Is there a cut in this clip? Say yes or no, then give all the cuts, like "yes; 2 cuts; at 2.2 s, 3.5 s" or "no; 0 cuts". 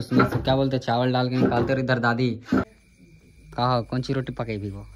yes; 1 cut; at 2.7 s